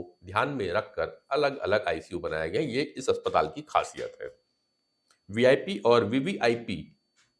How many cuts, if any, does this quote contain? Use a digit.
0